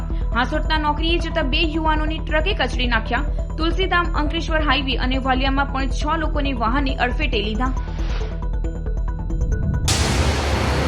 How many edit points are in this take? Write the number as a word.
one